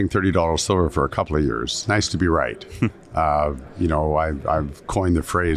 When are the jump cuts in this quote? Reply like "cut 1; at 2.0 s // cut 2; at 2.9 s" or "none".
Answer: cut 1; at 1.8 s